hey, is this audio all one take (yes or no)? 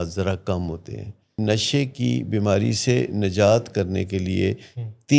no